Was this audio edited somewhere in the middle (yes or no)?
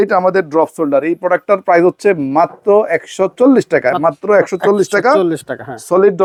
no